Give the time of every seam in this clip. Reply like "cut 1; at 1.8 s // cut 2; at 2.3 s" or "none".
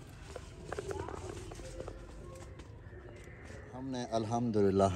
cut 1; at 3.9 s

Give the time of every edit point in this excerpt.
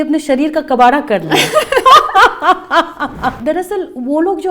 cut 1; at 3.4 s

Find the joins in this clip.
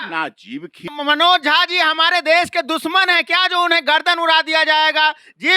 cut 1; at 0.9 s

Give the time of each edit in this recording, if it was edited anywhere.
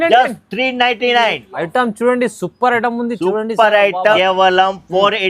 cut 1; at 4.2 s

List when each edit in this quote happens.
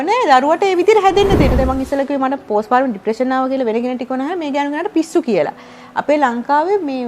cut 1; at 1.5 s

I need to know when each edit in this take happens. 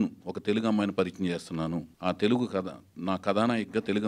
cut 1; at 1.9 s

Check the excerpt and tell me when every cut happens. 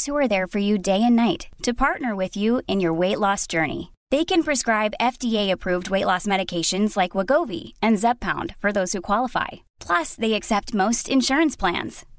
none

